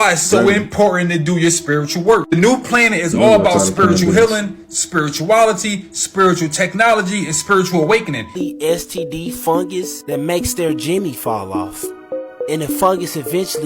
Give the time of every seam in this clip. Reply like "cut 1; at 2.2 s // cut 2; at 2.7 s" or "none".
cut 1; at 8.4 s